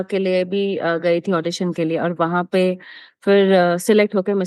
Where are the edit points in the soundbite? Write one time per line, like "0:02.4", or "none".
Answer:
none